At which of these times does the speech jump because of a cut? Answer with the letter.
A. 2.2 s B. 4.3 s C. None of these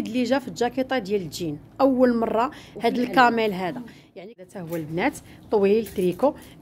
B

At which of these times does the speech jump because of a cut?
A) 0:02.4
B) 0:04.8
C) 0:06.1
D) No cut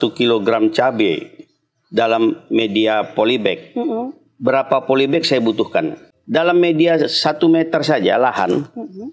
C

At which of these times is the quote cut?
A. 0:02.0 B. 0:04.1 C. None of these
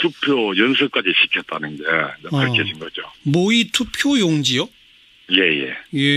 A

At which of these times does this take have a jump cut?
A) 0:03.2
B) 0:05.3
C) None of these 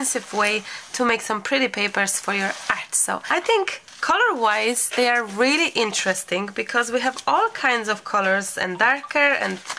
A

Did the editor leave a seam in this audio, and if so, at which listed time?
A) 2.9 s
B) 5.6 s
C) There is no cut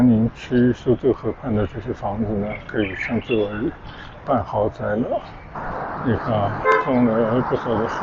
B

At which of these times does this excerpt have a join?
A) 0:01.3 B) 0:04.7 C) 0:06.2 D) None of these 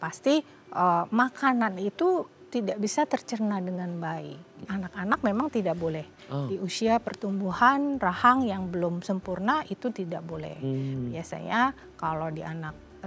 B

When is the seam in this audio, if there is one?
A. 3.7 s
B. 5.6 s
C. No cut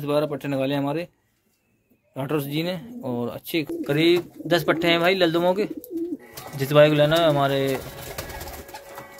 A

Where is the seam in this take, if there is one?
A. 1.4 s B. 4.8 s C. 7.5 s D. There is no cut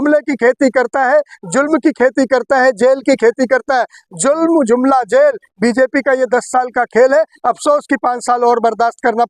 D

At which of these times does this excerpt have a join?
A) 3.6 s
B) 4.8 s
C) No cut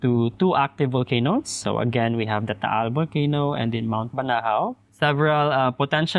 B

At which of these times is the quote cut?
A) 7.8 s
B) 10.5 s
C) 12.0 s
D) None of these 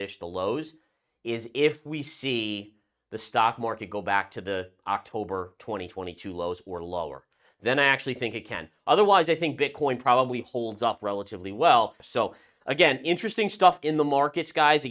C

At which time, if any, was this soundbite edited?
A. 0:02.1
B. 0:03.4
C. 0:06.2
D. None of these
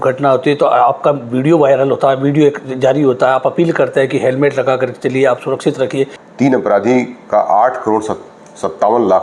C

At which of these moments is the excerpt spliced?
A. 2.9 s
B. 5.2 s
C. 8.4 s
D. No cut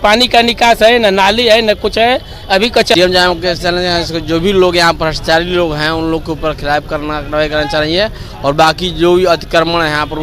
A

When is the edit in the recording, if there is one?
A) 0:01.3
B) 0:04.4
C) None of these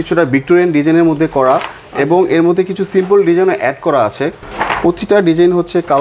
B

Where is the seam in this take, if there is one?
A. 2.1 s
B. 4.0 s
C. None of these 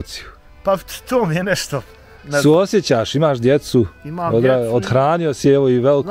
C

